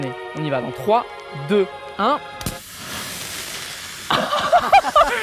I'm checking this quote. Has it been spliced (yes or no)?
no